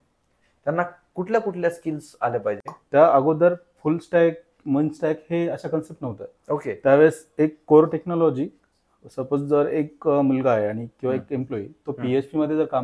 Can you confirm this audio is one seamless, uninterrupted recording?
no; 1 cut; at 2.7 s

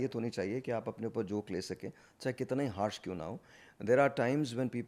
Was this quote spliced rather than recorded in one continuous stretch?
no; 0 cuts

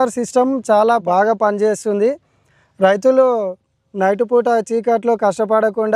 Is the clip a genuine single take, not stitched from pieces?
no; 1 cut; at 1.0 s

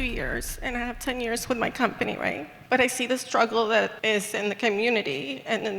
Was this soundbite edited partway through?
yes; 2 cuts; at 2.5 s, 4.0 s

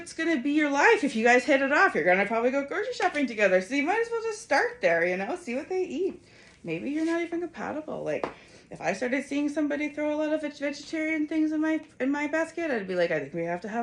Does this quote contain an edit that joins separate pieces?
no; 0 cuts

